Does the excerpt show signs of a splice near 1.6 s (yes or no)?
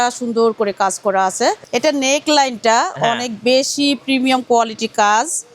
yes